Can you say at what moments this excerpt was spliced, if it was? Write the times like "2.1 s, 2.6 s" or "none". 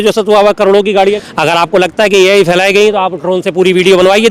1.2 s

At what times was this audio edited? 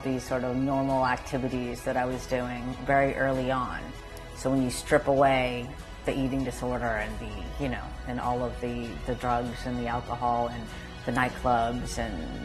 none

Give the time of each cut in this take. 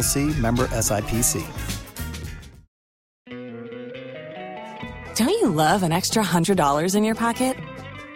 3.2 s

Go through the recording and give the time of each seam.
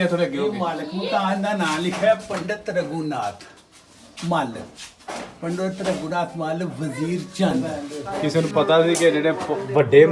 7.7 s

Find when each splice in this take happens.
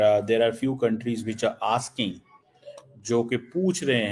none

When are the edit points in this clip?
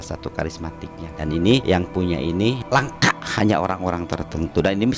1.0 s, 1.6 s, 2.6 s

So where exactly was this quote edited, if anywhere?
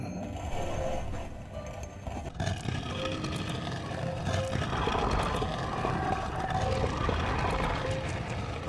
none

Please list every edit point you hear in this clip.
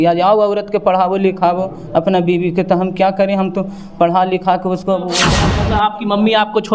5.4 s

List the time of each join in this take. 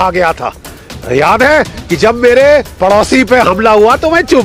none

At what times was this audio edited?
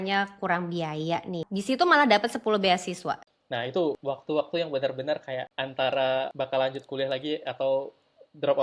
1.4 s, 3.3 s, 4.0 s, 5.6 s, 6.3 s

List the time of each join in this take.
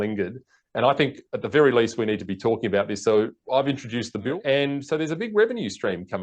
4.3 s

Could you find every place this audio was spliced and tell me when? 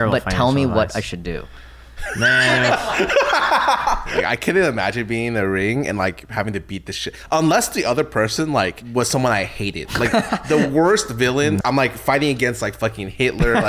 4.3 s, 8.8 s, 11.6 s

